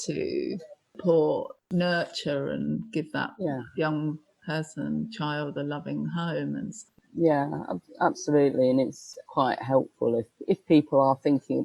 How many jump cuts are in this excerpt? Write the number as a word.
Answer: three